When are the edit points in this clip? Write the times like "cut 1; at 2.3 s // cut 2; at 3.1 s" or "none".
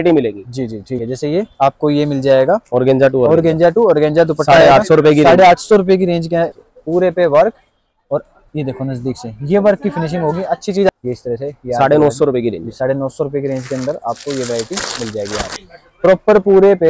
cut 1; at 1.0 s // cut 2; at 6.5 s // cut 3; at 10.9 s // cut 4; at 15.6 s